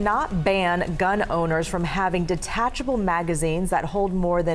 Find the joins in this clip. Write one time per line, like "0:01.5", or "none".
none